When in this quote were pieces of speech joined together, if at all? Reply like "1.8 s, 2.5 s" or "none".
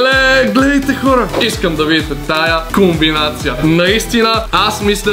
1.3 s